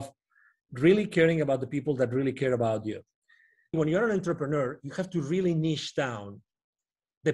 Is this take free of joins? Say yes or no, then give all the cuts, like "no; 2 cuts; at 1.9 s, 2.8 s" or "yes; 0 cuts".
no; 1 cut; at 3.8 s